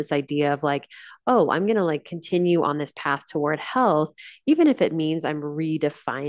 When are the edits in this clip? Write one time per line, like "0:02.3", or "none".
none